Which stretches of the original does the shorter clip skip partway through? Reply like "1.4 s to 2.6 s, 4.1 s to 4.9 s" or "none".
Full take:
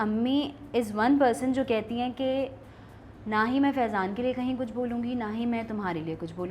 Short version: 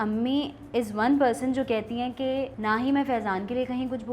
2.5 s to 3.2 s